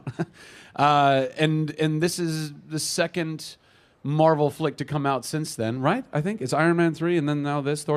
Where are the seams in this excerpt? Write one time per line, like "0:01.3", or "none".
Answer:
0:01.1